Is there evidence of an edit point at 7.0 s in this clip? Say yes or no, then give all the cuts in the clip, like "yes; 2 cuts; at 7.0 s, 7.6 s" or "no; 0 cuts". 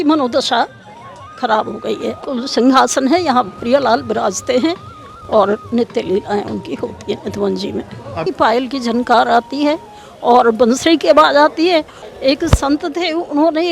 no; 3 cuts; at 2.2 s, 8.2 s, 12.0 s